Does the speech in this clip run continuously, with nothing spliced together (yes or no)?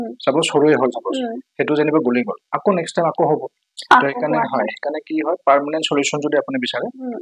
yes